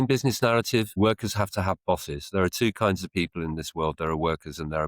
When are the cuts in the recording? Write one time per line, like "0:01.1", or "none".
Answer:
0:00.9